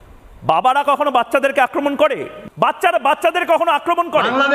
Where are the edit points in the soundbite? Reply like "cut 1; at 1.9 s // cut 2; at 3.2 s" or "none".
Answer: cut 1; at 2.3 s